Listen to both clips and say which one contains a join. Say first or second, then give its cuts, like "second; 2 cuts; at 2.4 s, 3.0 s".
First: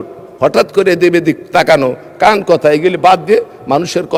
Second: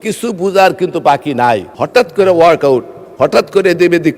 second; 1 cut; at 1.7 s